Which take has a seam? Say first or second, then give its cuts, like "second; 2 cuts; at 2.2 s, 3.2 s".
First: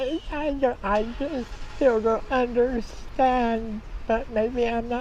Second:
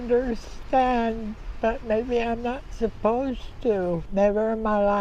second; 1 cut; at 4.0 s